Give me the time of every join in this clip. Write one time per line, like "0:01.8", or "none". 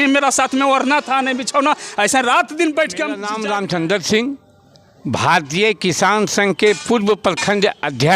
0:03.3